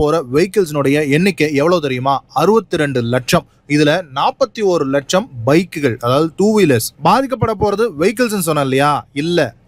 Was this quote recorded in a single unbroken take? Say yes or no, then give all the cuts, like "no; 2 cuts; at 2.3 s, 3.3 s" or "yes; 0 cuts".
yes; 0 cuts